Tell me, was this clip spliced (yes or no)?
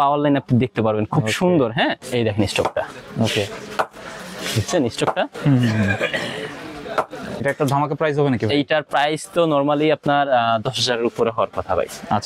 yes